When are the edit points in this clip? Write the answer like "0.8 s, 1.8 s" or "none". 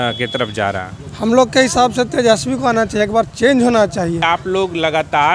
4.2 s